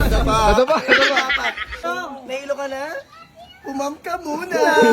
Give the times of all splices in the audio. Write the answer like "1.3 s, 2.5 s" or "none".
1.8 s